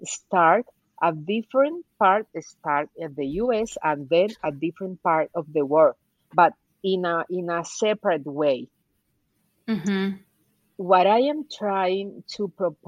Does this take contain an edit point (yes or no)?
no